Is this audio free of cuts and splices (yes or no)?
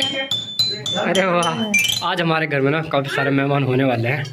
no